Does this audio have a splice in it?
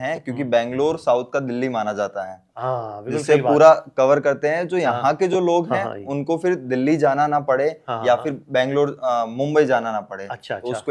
no; 0 cuts

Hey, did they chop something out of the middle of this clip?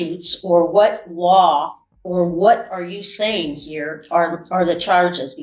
no; 0 cuts

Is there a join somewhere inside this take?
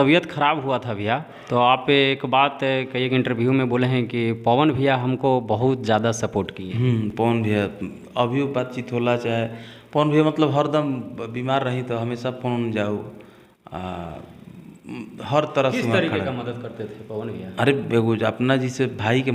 no; 0 cuts

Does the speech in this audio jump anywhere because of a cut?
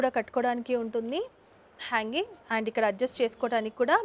no; 0 cuts

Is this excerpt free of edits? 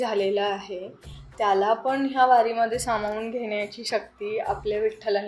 yes; 0 cuts

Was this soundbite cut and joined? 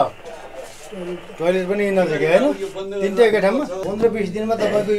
yes; 1 cut; at 3.8 s

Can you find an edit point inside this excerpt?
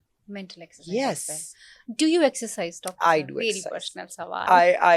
no; 0 cuts

